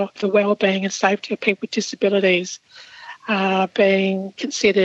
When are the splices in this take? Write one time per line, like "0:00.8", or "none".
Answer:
none